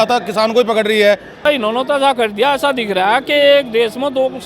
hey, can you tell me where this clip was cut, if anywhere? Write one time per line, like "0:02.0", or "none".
0:01.4

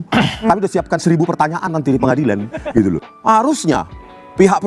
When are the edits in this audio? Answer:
0:03.1

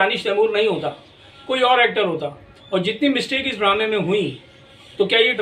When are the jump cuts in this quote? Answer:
none

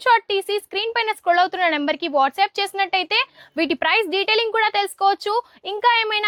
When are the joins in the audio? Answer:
none

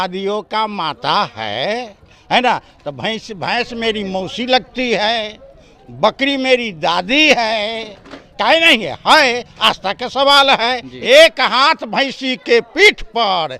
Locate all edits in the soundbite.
0:10.9

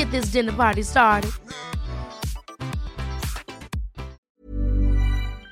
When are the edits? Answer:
0:04.3

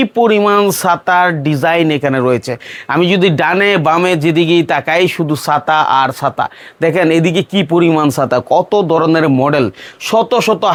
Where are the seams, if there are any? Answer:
none

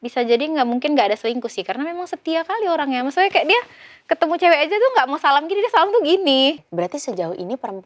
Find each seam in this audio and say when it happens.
0:06.6

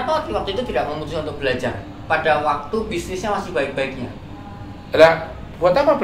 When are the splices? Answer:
none

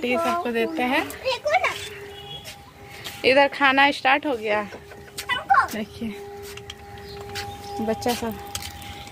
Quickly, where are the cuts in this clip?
none

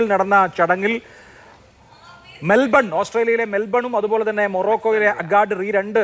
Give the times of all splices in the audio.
none

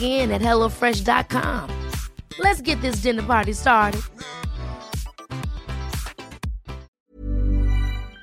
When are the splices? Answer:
0:06.9

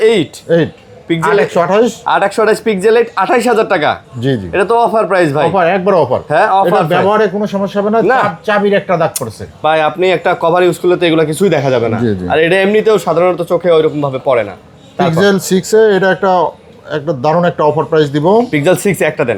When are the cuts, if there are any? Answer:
none

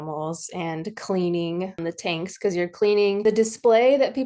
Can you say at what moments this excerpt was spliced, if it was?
0:01.8
0:03.2

